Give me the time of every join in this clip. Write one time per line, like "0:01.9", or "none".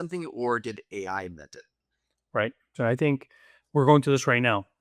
0:02.7